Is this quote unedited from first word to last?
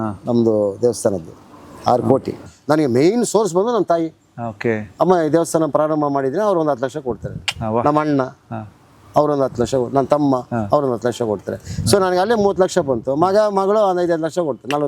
no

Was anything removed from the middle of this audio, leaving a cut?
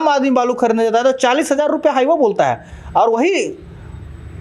no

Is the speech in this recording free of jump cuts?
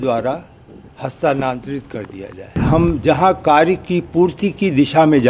no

